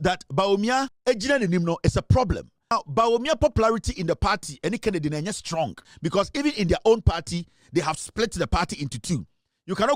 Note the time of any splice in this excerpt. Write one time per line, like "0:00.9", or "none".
0:00.9
0:02.7
0:05.8